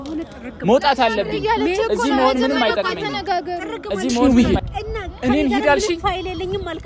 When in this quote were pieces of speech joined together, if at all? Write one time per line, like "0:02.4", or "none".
0:04.2